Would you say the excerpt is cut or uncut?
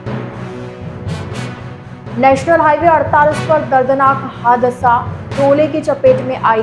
cut